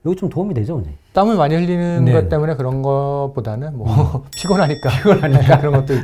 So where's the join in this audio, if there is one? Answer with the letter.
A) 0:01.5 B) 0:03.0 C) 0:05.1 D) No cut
D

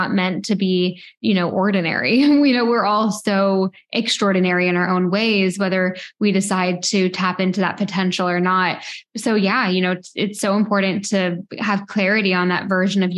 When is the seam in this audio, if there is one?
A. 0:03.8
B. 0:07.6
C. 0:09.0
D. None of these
C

